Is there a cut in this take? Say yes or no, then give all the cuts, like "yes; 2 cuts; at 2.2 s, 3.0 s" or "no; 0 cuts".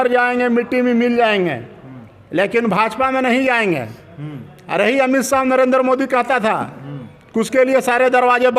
no; 0 cuts